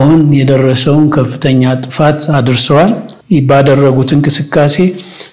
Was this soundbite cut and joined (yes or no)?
yes